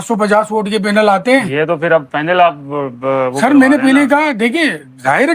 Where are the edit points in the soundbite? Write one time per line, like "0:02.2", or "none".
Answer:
none